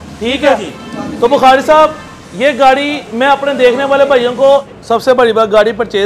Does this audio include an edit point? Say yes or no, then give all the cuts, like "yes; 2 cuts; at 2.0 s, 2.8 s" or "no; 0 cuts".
yes; 1 cut; at 4.7 s